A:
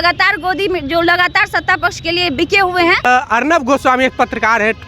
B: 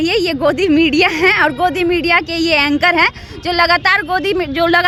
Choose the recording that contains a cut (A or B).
A